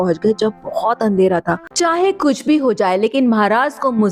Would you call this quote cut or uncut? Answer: cut